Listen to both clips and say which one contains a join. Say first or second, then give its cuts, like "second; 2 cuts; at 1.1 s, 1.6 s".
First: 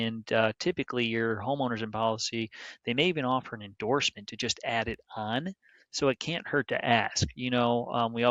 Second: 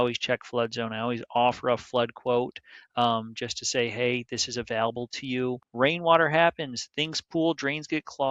second; 1 cut; at 5.6 s